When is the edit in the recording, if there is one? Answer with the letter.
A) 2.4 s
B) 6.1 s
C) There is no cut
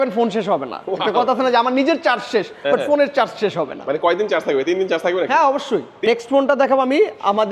B